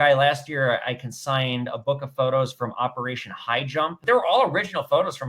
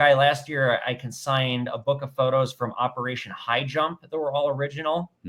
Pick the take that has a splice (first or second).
first